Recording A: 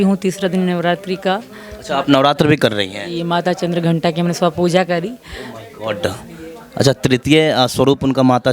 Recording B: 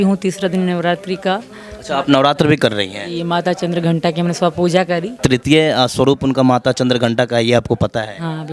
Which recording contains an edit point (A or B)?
B